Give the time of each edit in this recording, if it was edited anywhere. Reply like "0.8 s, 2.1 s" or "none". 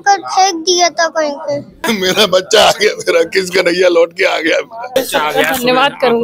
1.8 s, 4.9 s